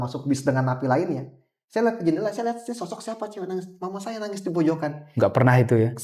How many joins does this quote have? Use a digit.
0